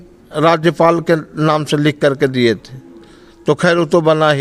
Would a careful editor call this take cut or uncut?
uncut